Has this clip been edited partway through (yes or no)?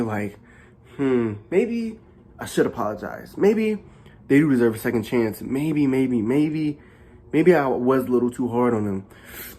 no